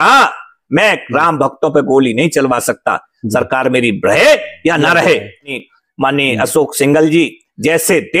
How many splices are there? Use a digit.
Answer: 1